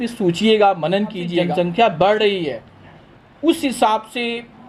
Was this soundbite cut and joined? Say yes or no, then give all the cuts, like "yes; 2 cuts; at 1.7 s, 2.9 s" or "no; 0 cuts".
yes; 1 cut; at 1.4 s